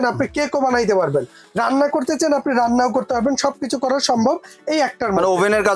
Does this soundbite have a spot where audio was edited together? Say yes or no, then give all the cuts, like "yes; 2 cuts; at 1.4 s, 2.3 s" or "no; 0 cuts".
no; 0 cuts